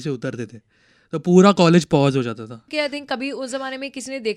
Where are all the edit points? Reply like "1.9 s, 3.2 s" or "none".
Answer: 2.6 s